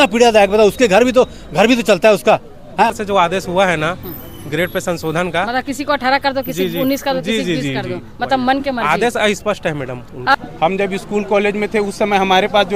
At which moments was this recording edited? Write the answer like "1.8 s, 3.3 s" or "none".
2.9 s, 10.3 s